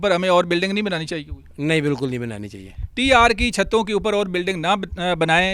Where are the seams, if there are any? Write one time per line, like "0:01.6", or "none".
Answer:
none